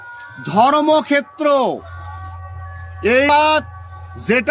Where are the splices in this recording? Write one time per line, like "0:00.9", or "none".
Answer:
0:03.3